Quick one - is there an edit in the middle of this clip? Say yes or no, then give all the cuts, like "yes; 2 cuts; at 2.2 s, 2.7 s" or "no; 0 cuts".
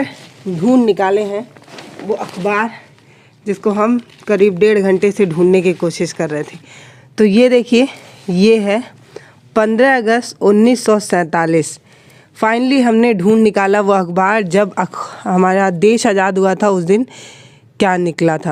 no; 0 cuts